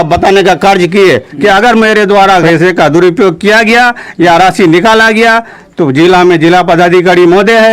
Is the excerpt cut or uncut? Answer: cut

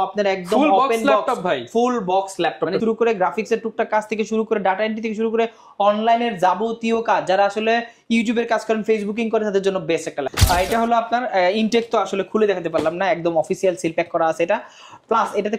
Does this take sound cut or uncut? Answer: cut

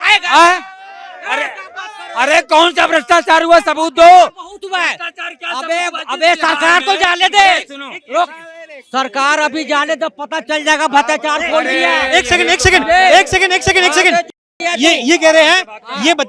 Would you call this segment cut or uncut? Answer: uncut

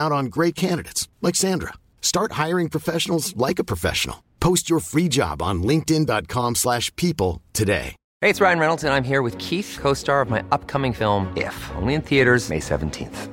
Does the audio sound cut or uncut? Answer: cut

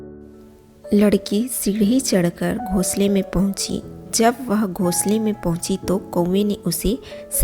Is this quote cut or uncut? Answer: cut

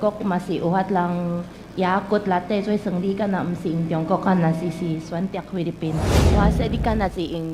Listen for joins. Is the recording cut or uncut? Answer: cut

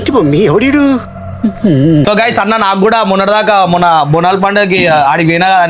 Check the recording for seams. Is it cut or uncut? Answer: cut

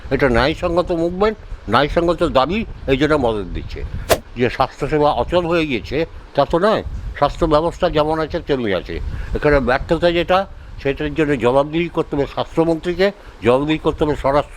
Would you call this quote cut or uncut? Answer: cut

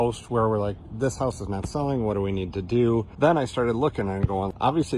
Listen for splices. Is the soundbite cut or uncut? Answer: cut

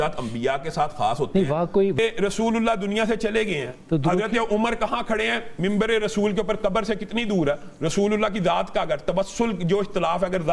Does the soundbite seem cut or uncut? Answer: cut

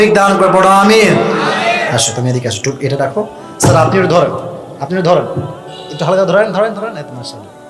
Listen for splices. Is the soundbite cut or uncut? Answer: cut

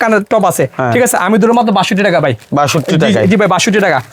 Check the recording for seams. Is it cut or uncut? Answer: uncut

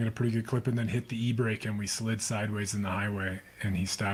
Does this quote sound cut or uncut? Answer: uncut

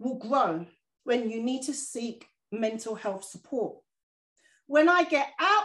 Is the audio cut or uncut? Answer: cut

